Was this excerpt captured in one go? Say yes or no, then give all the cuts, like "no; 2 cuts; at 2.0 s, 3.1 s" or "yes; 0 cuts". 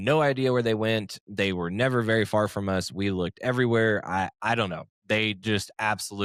yes; 0 cuts